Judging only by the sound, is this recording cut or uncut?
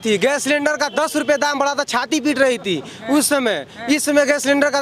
uncut